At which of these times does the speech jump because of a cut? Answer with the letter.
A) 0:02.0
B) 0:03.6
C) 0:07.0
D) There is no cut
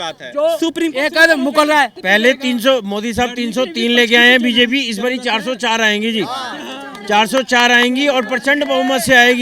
A